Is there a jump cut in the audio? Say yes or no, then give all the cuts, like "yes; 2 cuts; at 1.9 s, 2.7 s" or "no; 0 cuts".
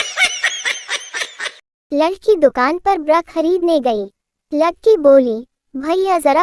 yes; 1 cut; at 1.3 s